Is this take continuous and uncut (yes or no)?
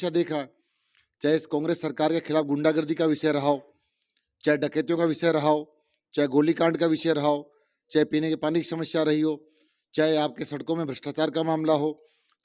yes